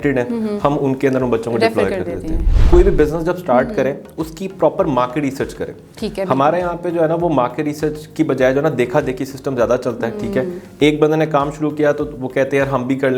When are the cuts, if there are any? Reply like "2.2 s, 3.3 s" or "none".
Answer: 2.5 s